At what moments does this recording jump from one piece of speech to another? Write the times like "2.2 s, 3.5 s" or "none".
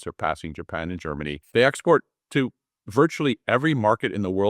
1.4 s